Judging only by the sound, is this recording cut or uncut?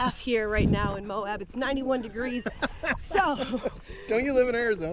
uncut